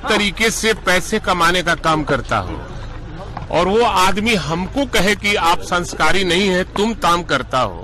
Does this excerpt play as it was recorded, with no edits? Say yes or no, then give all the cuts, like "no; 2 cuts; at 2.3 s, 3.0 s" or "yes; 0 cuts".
yes; 0 cuts